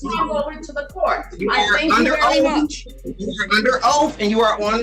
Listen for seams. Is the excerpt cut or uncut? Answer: uncut